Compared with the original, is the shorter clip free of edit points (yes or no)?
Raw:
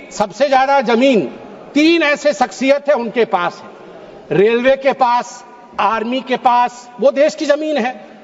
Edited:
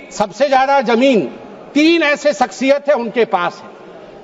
yes